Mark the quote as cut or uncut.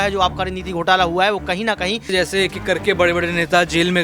cut